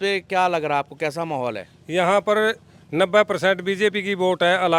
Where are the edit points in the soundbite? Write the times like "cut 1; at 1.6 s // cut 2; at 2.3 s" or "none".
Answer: none